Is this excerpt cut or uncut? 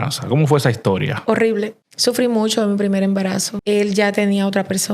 cut